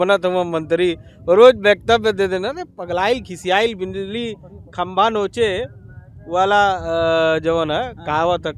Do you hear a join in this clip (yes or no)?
no